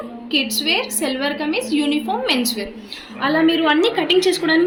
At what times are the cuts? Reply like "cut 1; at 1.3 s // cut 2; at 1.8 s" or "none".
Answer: none